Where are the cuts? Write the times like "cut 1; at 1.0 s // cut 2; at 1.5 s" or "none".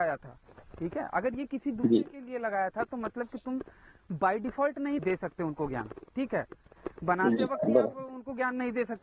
cut 1; at 5.0 s